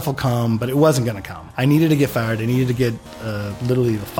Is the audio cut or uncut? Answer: uncut